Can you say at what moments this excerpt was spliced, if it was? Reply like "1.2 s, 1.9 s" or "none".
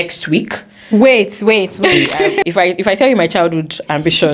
2.4 s